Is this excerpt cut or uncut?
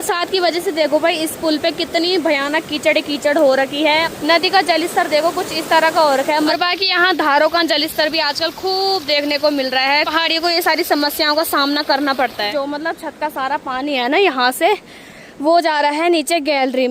cut